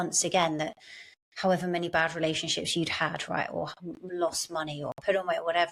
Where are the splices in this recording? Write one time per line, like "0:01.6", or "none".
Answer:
none